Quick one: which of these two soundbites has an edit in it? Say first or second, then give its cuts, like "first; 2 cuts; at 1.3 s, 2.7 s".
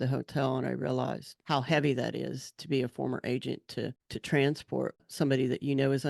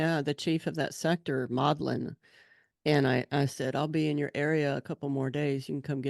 first; 3 cuts; at 1.3 s, 4.1 s, 5.0 s